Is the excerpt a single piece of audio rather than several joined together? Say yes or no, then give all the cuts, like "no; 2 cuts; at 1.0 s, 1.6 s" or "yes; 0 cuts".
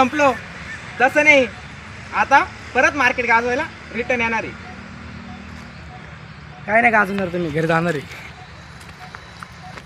yes; 0 cuts